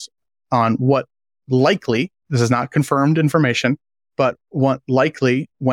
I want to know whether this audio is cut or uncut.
uncut